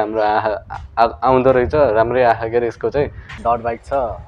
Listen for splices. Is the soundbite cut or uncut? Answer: cut